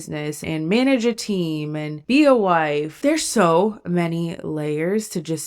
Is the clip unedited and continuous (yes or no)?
no